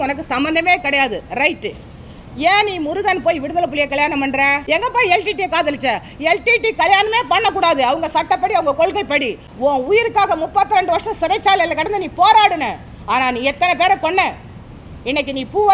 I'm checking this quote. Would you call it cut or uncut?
cut